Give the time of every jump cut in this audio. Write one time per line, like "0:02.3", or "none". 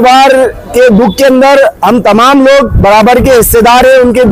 none